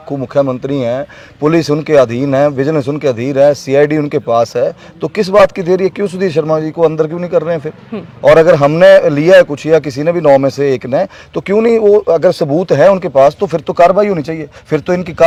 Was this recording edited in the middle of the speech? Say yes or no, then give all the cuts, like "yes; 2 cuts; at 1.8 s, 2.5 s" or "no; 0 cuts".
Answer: no; 0 cuts